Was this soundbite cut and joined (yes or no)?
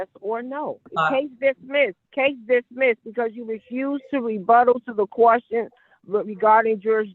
yes